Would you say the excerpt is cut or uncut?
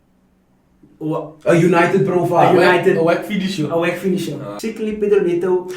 cut